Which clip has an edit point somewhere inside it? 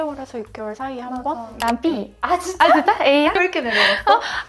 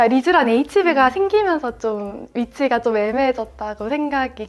first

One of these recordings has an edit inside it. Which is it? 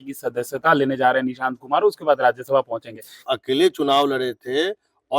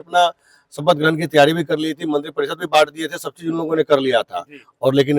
first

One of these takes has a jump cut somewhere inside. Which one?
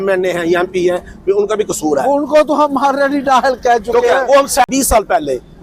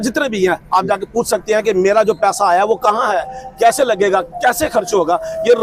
first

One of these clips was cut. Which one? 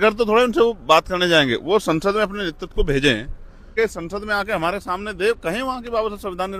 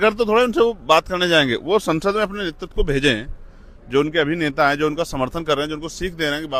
first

